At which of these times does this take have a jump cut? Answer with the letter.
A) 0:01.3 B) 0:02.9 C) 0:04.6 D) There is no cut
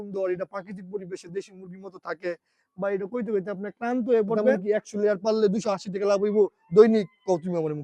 C